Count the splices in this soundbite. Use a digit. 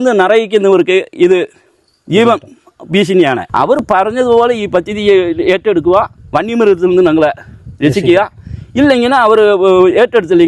1